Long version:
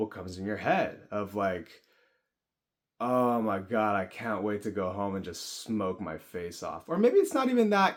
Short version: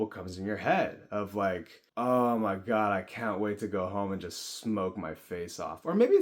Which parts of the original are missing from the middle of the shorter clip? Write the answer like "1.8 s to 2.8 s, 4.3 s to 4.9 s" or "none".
1.8 s to 2.8 s